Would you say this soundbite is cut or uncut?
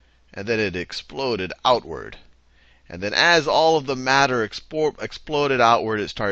cut